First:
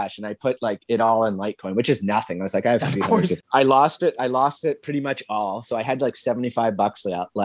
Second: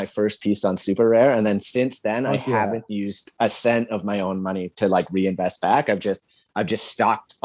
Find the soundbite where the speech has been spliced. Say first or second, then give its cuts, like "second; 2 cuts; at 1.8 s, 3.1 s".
first; 1 cut; at 3.4 s